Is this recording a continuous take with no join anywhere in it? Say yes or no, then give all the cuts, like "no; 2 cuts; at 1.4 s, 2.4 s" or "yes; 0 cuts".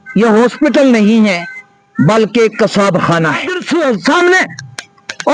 no; 1 cut; at 3.5 s